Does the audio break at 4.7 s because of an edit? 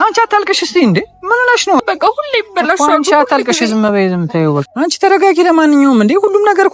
yes; 2 cuts; at 1.8 s, 4.7 s

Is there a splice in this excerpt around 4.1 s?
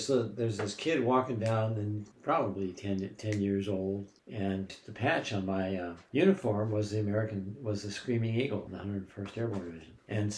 yes; 1 cut; at 4.1 s

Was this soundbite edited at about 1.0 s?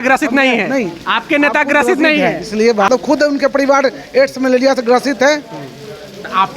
no; 1 cut; at 2.9 s

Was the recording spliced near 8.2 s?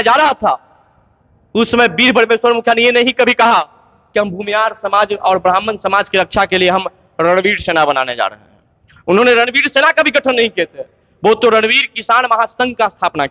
no; 0 cuts

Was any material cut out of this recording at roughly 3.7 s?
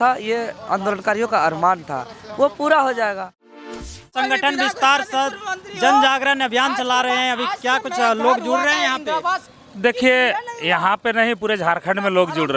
yes; 1 cut; at 3.7 s

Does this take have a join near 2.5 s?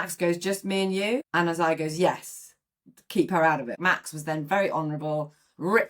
no; 2 cuts; at 1.3 s, 3.8 s

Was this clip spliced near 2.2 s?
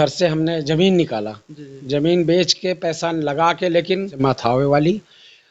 no; 1 cut; at 4.1 s

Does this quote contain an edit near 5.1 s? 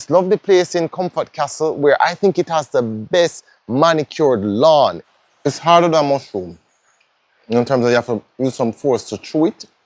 yes; 1 cut; at 5.1 s

